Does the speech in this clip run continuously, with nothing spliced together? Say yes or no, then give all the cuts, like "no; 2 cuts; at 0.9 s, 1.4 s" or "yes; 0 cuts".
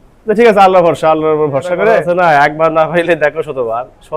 no; 1 cut; at 2.0 s